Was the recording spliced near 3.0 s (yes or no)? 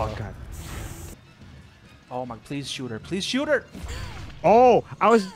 no